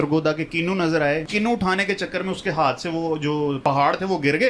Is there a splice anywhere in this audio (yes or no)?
yes